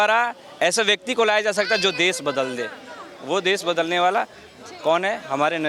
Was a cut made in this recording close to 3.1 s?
no; 0 cuts

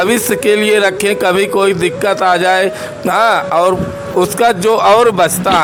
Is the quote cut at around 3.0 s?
no; 0 cuts

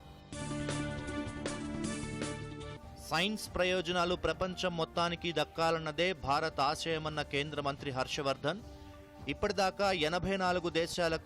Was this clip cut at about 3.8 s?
no; 0 cuts

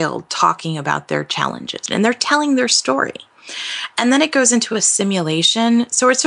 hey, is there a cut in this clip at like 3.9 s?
no; 1 cut; at 1.8 s

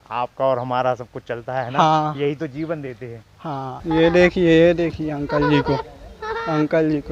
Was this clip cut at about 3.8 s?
yes; 1 cut; at 3.8 s

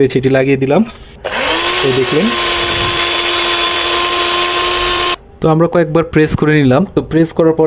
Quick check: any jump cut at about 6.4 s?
no; 2 cuts; at 1.2 s, 5.1 s

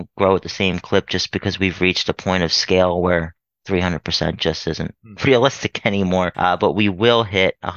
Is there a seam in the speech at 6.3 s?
yes; 1 cut; at 6.3 s

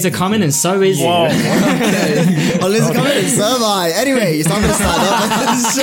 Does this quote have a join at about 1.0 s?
yes; 1 cut; at 1.0 s

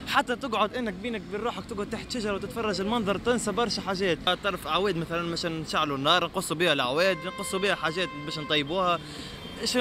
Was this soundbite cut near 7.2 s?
no; 1 cut; at 4.3 s

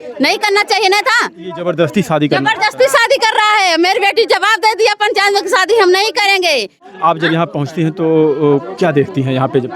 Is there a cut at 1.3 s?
no; 1 cut; at 6.8 s

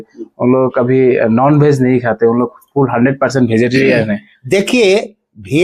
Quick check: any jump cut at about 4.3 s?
no; 0 cuts

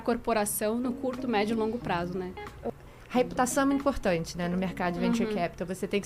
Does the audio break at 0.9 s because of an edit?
no; 1 cut; at 2.5 s

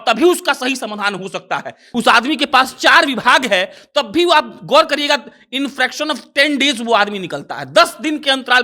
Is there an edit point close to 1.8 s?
yes; 1 cut; at 1.8 s

